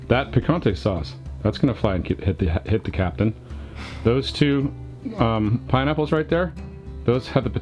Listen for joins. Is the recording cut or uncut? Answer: uncut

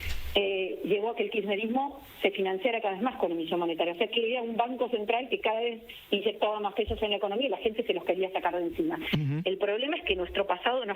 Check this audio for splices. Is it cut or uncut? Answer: cut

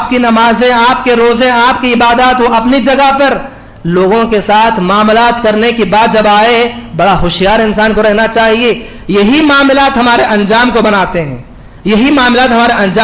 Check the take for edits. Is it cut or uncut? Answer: uncut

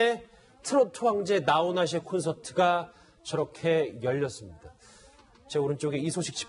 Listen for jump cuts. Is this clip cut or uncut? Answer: uncut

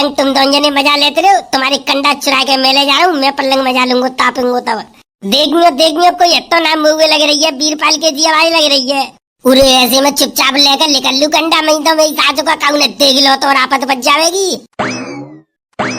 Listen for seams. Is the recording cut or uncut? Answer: uncut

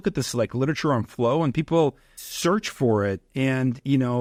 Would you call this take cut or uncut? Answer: uncut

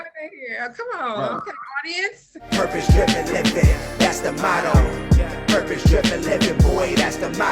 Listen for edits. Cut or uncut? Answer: cut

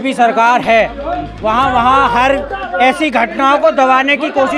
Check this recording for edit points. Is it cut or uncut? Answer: uncut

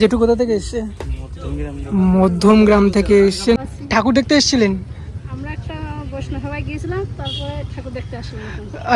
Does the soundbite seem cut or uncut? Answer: cut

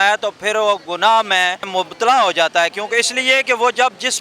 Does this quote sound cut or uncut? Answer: cut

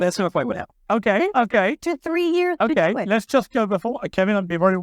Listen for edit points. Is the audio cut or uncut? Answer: uncut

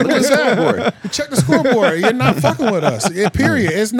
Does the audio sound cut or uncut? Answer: uncut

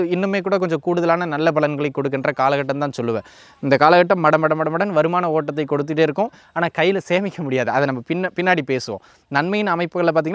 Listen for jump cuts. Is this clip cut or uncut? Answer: uncut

